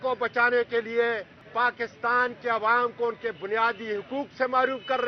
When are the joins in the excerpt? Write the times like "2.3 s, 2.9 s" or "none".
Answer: 1.4 s